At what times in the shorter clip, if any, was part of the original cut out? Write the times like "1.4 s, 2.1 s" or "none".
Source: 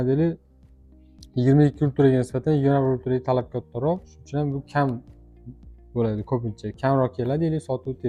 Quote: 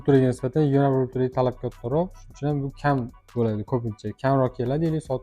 3.2 s